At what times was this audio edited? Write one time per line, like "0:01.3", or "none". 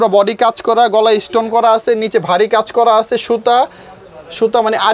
none